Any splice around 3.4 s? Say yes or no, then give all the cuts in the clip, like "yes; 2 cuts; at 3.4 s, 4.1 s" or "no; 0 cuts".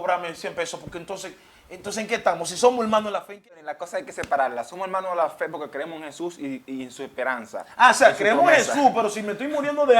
yes; 1 cut; at 3.4 s